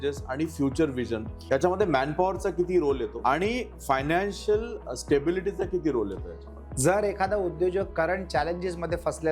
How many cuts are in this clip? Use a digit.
2